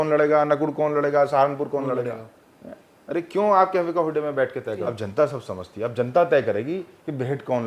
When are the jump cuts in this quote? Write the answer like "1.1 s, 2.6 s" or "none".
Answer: 4.9 s